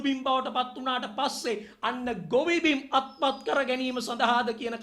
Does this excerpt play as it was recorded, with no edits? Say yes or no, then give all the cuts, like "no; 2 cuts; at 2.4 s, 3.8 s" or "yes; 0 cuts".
yes; 0 cuts